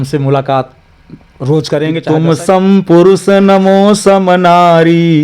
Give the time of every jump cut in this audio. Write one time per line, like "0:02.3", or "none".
0:02.0